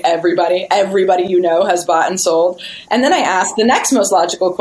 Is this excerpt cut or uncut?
uncut